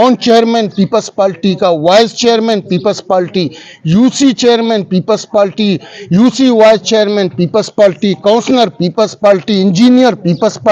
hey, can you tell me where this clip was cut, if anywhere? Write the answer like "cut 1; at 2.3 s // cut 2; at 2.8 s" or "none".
none